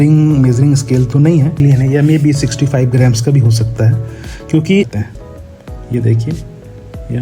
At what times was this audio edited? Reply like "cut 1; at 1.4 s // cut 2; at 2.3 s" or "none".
cut 1; at 1.6 s // cut 2; at 5.0 s